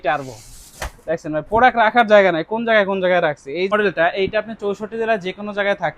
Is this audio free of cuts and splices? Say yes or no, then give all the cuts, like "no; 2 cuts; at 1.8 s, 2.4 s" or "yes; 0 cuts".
no; 1 cut; at 3.7 s